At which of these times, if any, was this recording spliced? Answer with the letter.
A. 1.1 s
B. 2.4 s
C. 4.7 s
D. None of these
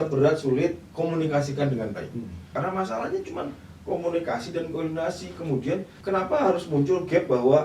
B